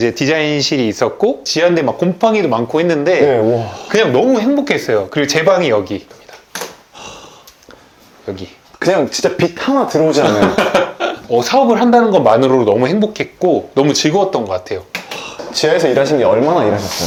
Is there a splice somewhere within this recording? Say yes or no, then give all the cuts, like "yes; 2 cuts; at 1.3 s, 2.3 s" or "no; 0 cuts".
no; 0 cuts